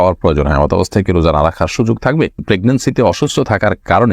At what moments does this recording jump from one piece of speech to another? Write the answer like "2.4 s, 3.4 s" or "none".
2.4 s